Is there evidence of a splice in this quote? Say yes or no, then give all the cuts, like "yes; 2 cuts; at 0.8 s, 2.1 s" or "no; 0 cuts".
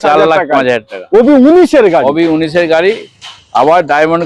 no; 0 cuts